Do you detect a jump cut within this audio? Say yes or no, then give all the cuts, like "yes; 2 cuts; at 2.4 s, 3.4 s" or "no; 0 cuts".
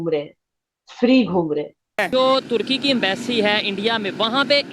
yes; 1 cut; at 2.0 s